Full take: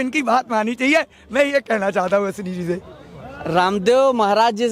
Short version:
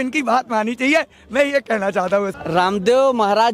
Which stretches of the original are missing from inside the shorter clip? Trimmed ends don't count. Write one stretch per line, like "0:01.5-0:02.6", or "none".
0:02.4-0:03.4